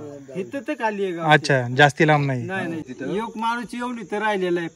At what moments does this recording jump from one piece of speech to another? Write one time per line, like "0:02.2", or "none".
0:02.9